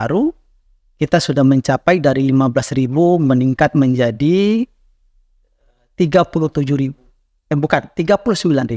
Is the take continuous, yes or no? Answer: yes